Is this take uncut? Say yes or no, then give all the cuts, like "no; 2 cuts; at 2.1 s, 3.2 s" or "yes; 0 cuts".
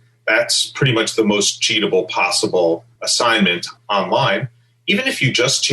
no; 1 cut; at 3.4 s